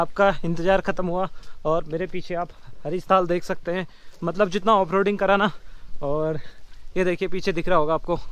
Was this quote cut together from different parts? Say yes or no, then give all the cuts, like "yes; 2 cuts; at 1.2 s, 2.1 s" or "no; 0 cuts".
no; 0 cuts